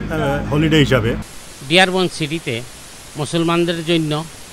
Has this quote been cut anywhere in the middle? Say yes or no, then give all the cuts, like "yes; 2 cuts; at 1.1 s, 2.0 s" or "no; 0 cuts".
yes; 1 cut; at 1.3 s